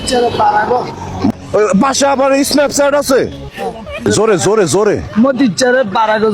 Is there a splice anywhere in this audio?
yes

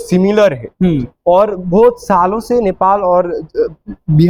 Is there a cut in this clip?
no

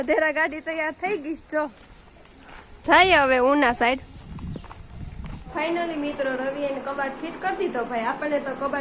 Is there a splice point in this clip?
yes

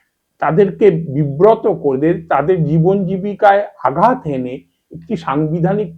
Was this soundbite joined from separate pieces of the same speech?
no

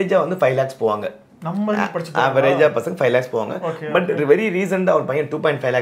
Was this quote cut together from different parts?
no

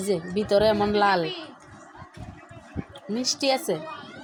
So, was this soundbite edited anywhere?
no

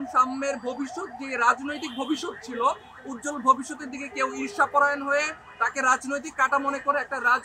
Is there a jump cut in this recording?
no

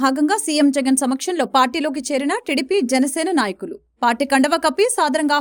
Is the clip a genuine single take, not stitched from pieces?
yes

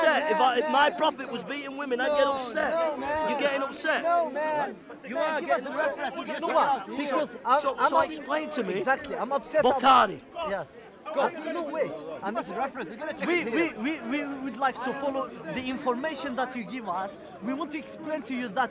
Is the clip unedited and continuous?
yes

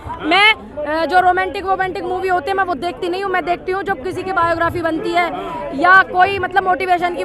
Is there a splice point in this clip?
no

